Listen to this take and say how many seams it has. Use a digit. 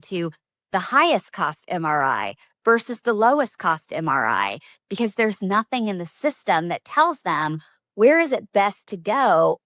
0